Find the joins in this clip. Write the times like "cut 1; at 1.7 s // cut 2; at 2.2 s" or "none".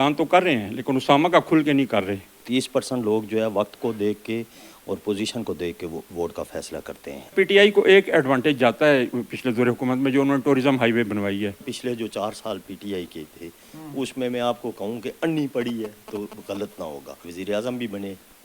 cut 1; at 2.3 s // cut 2; at 7.3 s // cut 3; at 11.7 s // cut 4; at 17.2 s